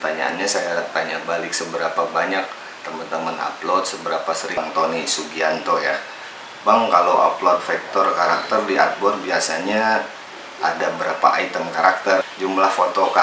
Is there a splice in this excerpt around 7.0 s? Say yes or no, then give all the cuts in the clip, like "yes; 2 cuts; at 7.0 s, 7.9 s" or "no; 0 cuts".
no; 2 cuts; at 4.6 s, 12.3 s